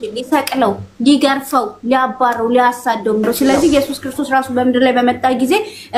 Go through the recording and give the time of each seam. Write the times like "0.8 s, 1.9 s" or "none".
3.7 s